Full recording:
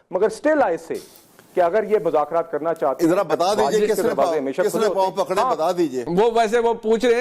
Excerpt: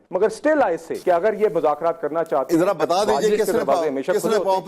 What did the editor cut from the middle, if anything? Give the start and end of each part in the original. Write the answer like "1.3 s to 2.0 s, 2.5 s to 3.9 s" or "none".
0.9 s to 1.4 s